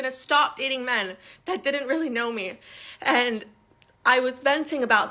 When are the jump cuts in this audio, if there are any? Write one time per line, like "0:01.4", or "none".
0:01.4